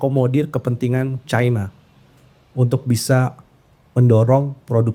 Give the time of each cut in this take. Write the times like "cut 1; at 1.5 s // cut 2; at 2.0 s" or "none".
none